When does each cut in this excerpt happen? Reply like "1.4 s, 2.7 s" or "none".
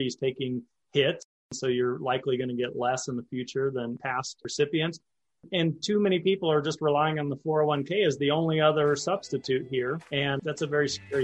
10.0 s